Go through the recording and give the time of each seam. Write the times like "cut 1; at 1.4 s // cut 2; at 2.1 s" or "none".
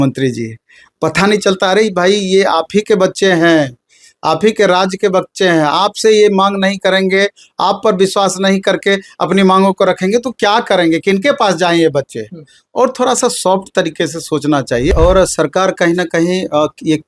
cut 1; at 14.9 s